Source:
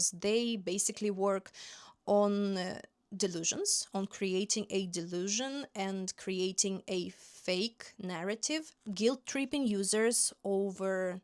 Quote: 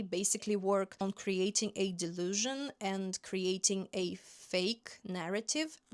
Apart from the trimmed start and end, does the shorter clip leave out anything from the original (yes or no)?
yes